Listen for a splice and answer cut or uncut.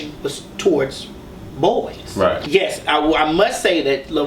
cut